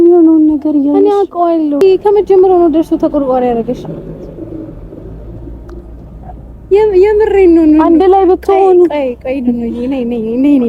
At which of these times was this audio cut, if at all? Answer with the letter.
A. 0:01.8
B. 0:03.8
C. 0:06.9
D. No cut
A